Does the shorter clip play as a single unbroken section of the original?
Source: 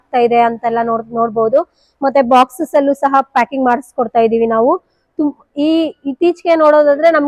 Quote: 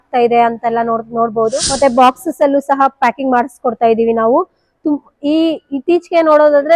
no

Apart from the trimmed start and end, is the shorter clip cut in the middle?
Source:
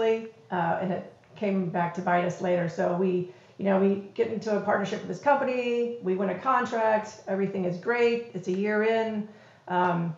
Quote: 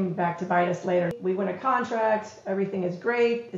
yes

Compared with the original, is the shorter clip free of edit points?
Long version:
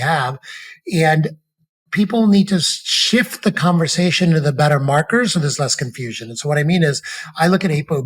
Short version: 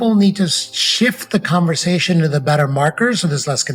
yes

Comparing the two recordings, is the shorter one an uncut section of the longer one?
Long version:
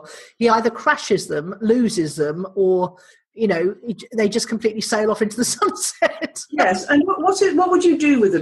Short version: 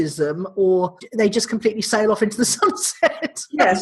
no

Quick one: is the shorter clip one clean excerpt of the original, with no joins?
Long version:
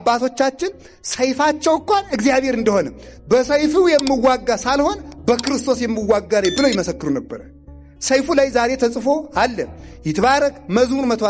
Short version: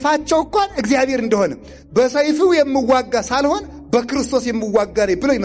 yes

